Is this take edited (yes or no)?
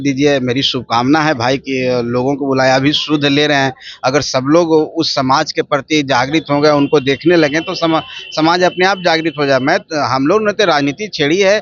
no